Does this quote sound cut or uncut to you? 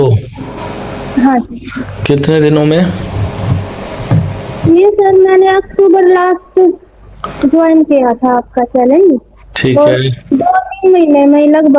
uncut